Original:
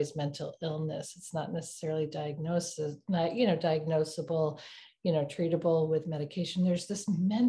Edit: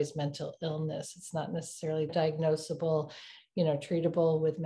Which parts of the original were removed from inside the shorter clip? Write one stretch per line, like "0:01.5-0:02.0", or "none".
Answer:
0:02.1-0:03.6